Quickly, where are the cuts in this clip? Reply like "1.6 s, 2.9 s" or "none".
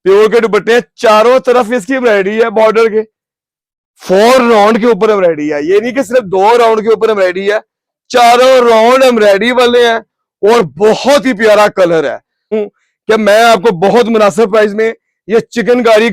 12.6 s